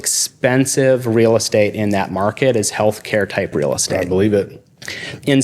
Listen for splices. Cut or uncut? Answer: uncut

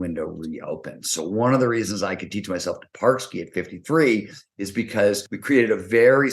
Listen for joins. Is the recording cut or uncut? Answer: cut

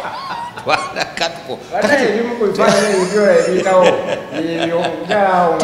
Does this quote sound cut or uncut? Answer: uncut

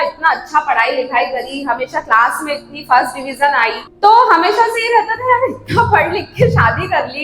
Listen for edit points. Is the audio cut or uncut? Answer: cut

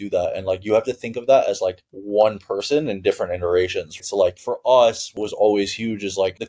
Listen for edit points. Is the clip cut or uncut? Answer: cut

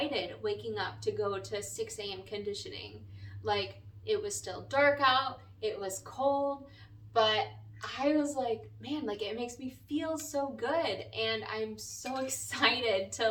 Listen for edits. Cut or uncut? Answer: uncut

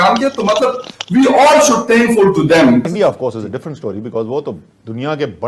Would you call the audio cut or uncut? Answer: cut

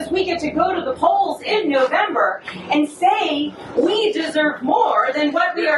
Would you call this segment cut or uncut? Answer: uncut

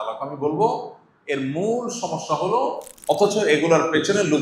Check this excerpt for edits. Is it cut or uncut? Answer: cut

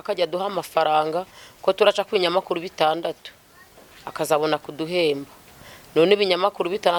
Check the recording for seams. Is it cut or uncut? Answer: uncut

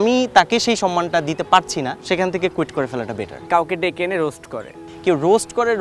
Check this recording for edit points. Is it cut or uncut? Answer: cut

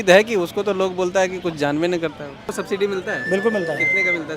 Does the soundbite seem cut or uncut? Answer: cut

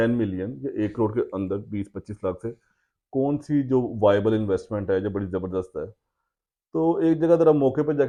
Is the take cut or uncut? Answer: uncut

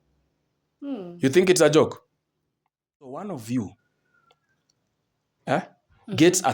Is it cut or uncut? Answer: cut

